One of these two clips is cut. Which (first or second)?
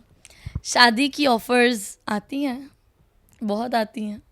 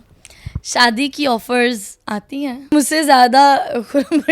second